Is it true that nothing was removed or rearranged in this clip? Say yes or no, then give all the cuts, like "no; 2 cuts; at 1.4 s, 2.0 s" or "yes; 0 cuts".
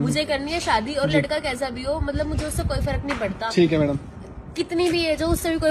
yes; 0 cuts